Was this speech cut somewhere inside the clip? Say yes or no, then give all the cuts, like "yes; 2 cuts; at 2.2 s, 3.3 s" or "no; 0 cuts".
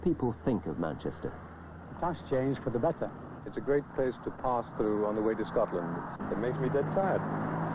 no; 0 cuts